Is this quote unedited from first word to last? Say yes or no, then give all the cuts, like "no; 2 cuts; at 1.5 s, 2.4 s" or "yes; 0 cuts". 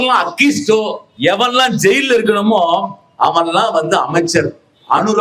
no; 1 cut; at 1.0 s